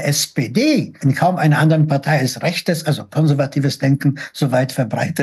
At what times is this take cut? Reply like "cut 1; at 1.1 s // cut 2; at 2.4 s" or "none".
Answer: cut 1; at 0.9 s